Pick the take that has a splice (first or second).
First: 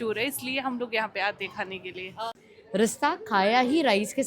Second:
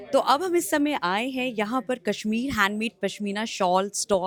first